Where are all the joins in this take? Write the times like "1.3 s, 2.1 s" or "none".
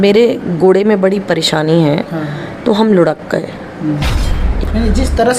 4.4 s